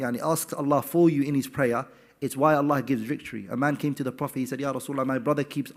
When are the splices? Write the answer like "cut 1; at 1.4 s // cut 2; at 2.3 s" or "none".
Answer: none